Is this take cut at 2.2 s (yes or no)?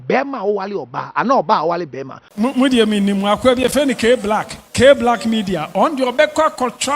yes